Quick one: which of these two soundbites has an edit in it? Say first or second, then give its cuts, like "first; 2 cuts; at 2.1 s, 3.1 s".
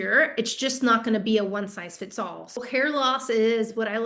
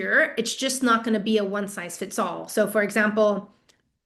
first; 1 cut; at 2.6 s